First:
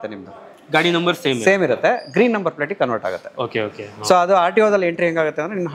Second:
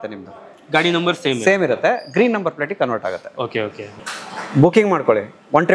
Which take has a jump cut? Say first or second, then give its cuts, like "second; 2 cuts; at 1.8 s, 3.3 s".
second; 1 cut; at 4.0 s